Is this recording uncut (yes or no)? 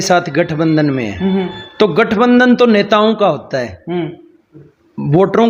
yes